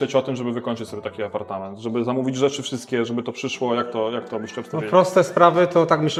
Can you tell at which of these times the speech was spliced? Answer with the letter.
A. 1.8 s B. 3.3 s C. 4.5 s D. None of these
D